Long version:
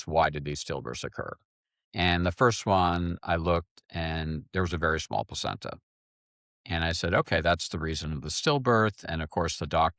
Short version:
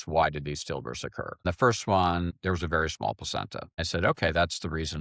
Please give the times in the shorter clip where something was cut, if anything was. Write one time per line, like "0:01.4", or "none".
0:01.4
0:02.4
0:03.8